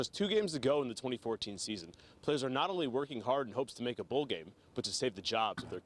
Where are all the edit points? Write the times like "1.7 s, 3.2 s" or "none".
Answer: none